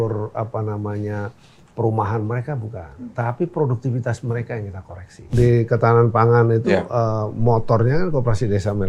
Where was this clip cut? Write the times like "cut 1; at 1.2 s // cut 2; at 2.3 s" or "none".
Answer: cut 1; at 5.3 s